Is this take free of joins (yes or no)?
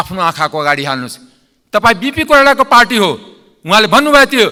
yes